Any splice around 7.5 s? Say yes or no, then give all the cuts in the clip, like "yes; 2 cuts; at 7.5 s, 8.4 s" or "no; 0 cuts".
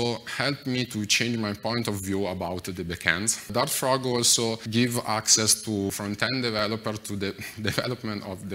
no; 3 cuts; at 3.5 s, 4.6 s, 5.9 s